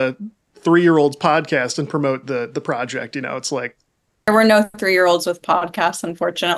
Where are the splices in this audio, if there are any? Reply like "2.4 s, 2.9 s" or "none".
4.3 s